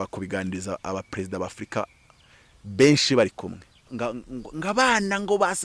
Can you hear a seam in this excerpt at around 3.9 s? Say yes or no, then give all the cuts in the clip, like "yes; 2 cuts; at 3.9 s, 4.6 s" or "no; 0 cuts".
yes; 1 cut; at 3.9 s